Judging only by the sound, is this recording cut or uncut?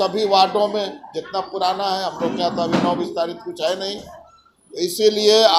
uncut